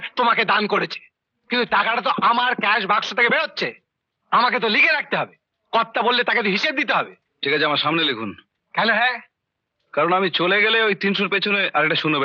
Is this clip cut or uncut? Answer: uncut